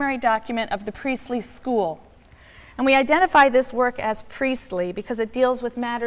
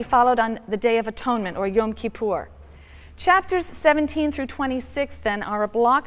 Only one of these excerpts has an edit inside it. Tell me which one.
second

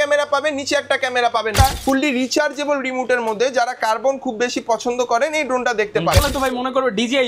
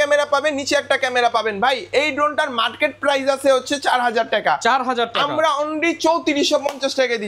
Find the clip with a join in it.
first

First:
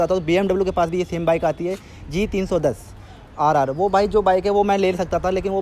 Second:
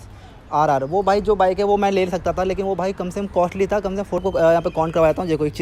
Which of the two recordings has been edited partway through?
second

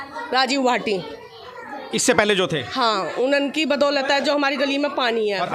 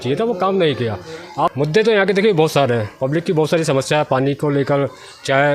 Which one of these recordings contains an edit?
second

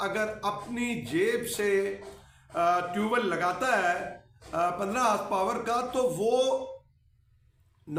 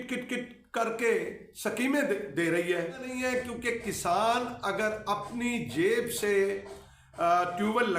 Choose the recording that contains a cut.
second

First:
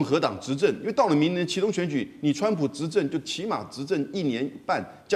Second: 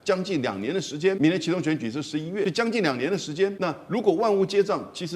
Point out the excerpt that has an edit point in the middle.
second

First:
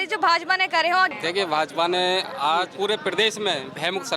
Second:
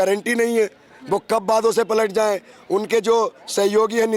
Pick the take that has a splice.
first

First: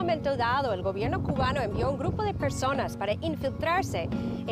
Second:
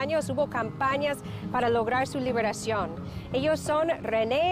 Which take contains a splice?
second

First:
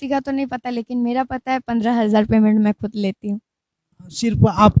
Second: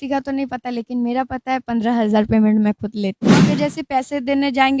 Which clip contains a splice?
second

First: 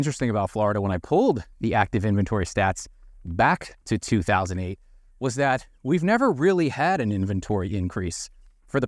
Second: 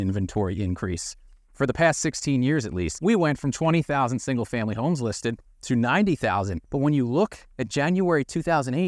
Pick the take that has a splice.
second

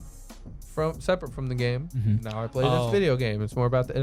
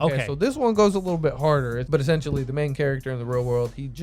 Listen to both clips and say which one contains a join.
second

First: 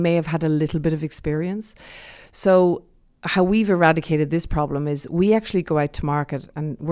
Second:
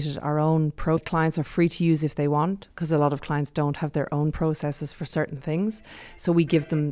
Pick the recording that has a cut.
second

